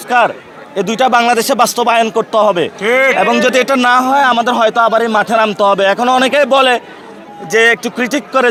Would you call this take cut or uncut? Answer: uncut